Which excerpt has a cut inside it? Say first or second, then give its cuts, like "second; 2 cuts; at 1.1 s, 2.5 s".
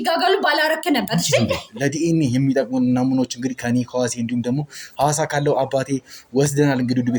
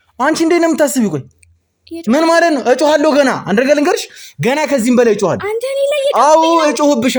first; 1 cut; at 1.7 s